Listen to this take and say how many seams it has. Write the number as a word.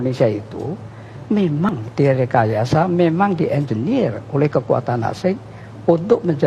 one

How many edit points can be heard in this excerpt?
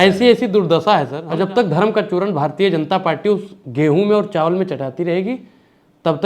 one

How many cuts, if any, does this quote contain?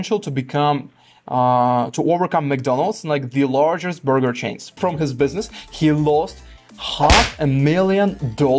one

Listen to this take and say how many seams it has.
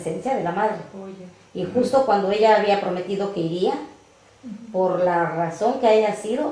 one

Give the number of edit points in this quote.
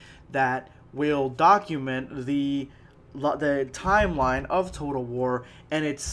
zero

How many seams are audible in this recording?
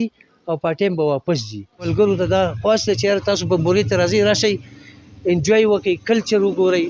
one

